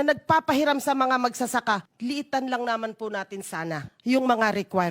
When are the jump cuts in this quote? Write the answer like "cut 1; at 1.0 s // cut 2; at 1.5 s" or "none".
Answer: cut 1; at 1.9 s // cut 2; at 3.9 s